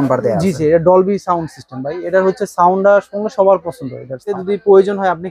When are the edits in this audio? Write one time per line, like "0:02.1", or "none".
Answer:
0:04.4